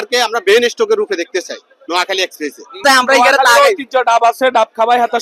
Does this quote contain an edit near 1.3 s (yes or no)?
no